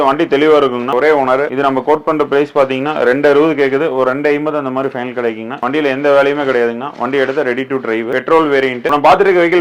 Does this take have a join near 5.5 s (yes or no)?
yes